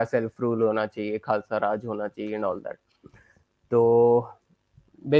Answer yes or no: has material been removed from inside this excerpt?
no